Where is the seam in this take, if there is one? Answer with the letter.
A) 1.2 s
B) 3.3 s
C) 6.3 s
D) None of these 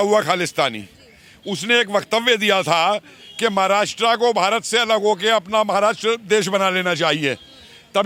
D